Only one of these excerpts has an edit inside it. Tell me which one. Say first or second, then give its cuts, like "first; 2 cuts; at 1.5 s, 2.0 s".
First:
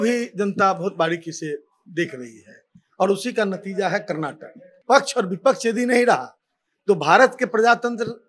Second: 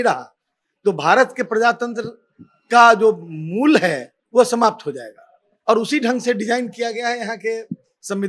first; 1 cut; at 4.7 s